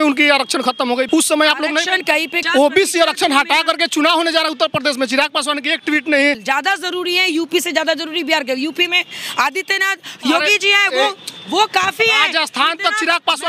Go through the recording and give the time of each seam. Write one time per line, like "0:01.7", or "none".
0:01.1
0:02.4
0:06.4